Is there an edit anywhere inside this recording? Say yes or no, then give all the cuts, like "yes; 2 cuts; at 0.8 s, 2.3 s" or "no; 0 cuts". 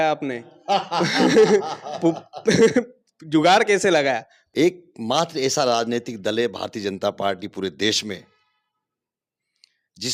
yes; 1 cut; at 4.3 s